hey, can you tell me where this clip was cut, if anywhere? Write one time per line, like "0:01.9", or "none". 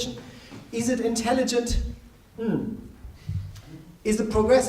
0:03.7

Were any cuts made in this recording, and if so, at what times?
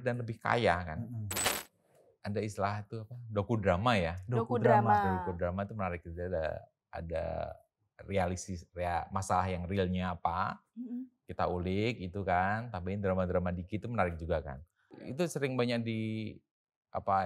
0:01.4
0:15.1

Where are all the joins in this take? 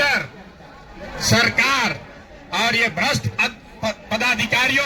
none

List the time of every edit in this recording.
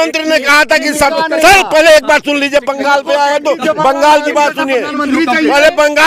none

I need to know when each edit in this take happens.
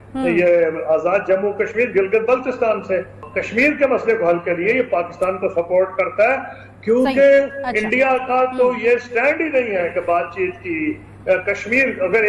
0:03.1

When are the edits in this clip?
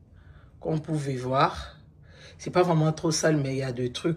none

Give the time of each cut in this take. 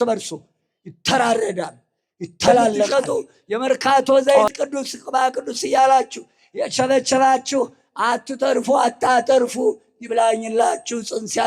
0:02.9

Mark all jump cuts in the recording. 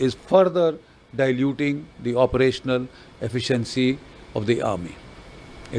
none

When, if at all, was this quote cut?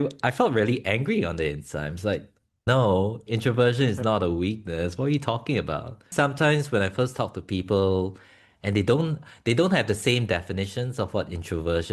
0:06.1

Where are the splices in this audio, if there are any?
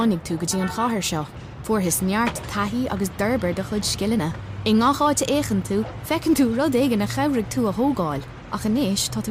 none

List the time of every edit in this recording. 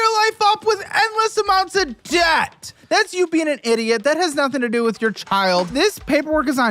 0:02.7
0:05.7

